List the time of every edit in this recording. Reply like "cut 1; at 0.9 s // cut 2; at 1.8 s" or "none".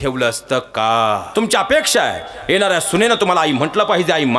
cut 1; at 1.3 s

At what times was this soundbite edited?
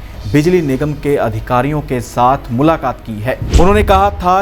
cut 1; at 3.4 s

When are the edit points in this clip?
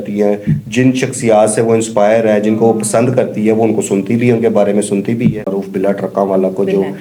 cut 1; at 5.5 s

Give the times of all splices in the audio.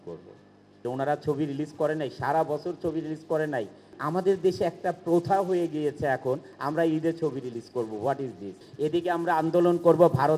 cut 1; at 0.8 s // cut 2; at 3.9 s // cut 3; at 6.5 s // cut 4; at 8.6 s

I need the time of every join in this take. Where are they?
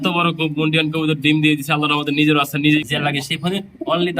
cut 1; at 2.8 s

